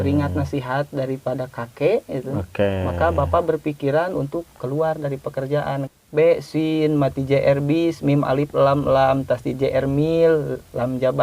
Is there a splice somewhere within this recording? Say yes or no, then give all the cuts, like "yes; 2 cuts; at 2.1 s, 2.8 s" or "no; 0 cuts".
yes; 1 cut; at 5.9 s